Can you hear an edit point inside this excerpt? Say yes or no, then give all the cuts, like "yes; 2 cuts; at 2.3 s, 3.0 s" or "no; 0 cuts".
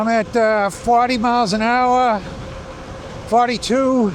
no; 0 cuts